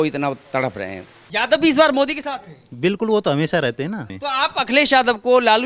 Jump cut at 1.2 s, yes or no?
yes